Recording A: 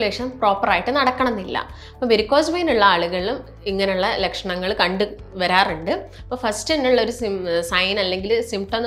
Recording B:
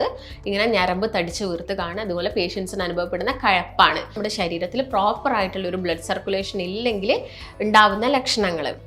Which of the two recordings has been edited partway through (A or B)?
B